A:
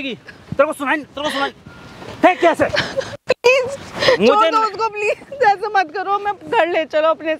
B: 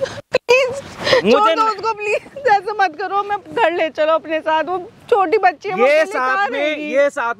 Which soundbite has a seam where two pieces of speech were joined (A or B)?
A